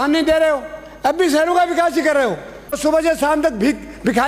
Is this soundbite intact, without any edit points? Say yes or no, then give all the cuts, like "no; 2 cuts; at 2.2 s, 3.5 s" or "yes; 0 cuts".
no; 1 cut; at 2.6 s